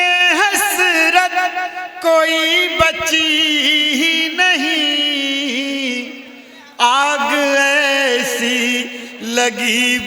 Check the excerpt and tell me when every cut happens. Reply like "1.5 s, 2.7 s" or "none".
none